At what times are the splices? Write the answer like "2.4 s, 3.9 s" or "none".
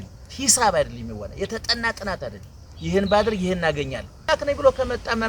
4.3 s